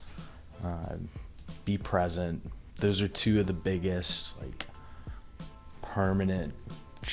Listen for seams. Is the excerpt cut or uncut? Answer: uncut